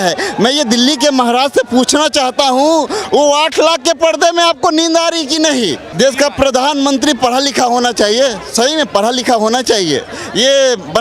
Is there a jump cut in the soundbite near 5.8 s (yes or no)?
yes